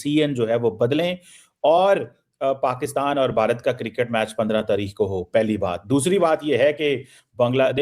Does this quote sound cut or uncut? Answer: uncut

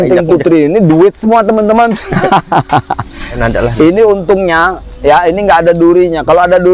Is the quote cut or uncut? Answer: cut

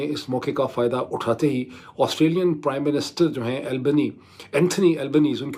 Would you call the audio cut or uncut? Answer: uncut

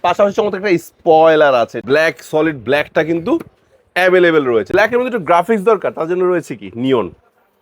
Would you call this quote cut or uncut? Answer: cut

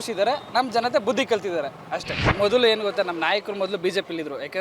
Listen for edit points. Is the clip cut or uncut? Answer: cut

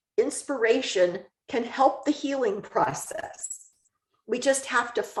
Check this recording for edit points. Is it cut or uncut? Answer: uncut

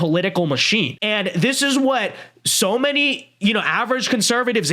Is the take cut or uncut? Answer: cut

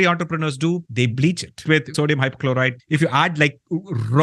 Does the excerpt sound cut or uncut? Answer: cut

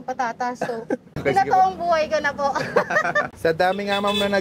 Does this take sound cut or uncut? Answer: cut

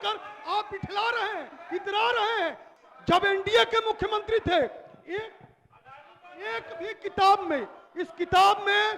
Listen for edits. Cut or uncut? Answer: cut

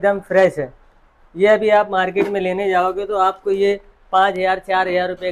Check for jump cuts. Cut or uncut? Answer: uncut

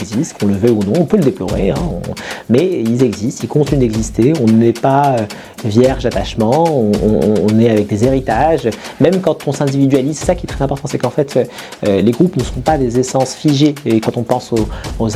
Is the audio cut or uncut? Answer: uncut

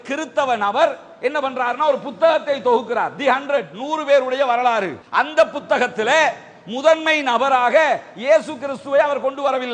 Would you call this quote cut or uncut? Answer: uncut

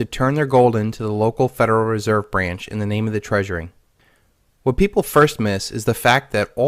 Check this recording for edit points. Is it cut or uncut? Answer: cut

